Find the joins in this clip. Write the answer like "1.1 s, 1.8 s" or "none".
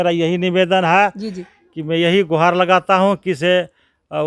none